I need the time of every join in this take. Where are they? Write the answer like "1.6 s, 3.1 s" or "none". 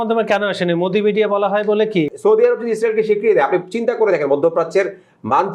2.1 s